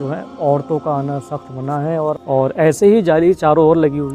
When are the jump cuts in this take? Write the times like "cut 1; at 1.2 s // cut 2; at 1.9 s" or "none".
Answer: cut 1; at 2.3 s